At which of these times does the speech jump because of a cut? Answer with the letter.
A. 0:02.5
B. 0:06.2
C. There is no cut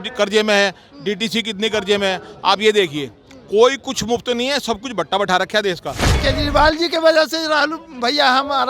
B